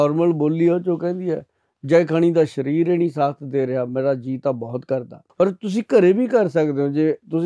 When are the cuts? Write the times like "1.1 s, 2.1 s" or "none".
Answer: 5.2 s